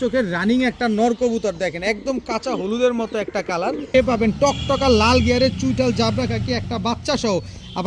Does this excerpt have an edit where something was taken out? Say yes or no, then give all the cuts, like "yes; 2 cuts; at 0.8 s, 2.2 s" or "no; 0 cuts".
yes; 1 cut; at 3.9 s